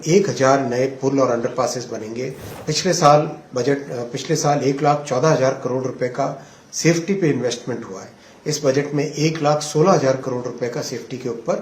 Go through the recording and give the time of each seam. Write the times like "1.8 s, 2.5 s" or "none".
2.5 s

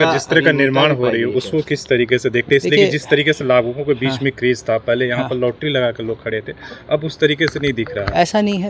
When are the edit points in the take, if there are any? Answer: none

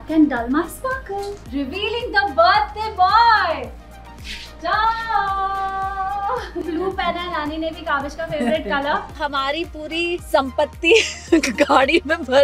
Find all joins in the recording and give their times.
1.4 s, 6.6 s, 9.0 s, 10.2 s

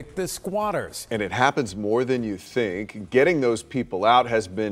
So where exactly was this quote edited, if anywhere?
1.0 s

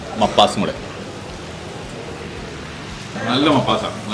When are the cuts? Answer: 3.2 s

